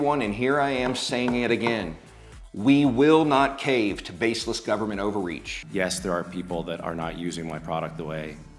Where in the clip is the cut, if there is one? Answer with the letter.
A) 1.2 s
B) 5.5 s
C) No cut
B